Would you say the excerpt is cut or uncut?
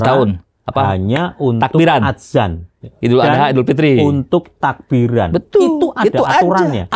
uncut